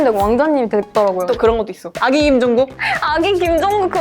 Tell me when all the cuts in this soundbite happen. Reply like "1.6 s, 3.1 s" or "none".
1.2 s, 2.9 s